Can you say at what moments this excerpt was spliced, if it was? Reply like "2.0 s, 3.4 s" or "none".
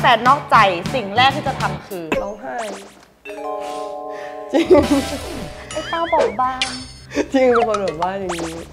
none